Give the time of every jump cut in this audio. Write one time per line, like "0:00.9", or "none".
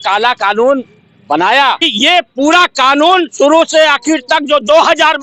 0:01.9